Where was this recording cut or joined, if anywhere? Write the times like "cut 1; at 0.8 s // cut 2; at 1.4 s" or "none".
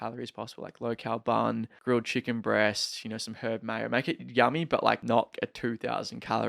cut 1; at 1.7 s // cut 2; at 5.3 s